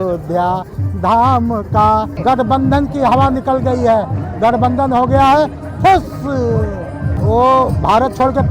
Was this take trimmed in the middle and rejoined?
yes; 2 cuts; at 2.1 s, 7.1 s

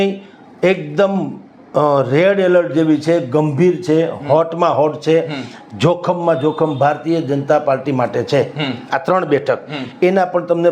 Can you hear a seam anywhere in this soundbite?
no; 0 cuts

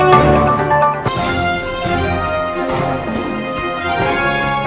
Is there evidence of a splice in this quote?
no; 0 cuts

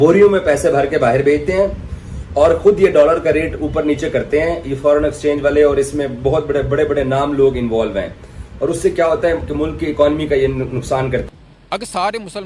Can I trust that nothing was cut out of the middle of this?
no; 1 cut; at 11.3 s

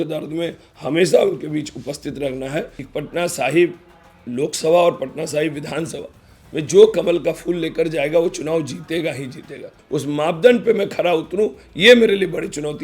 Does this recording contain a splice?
yes; 2 cuts; at 2.8 s, 9.8 s

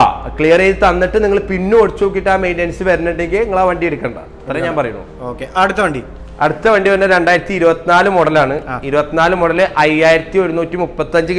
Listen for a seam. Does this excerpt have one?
no; 0 cuts

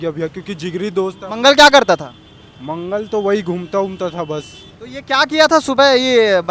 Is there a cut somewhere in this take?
no; 0 cuts

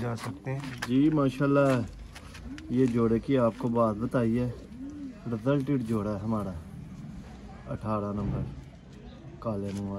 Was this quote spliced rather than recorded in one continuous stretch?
no; 0 cuts

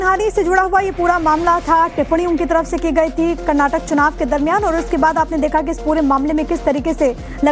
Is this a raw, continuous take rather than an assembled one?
no; 1 cut; at 3.4 s

